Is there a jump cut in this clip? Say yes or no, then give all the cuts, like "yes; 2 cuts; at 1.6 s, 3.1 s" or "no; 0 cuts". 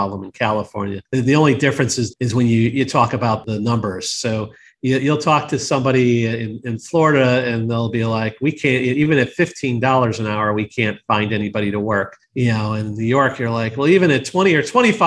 yes; 2 cuts; at 2.0 s, 3.4 s